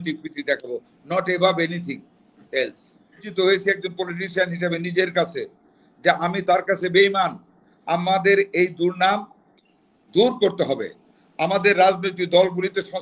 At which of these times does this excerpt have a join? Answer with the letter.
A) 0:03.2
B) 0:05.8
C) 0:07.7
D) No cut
A